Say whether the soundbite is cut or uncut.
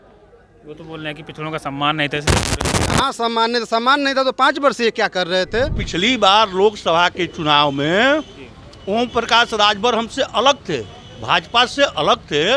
cut